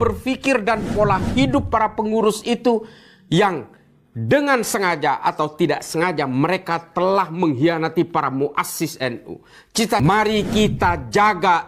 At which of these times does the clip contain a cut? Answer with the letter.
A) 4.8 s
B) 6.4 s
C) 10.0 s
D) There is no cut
C